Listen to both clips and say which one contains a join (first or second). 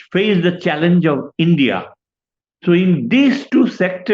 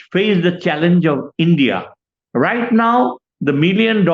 second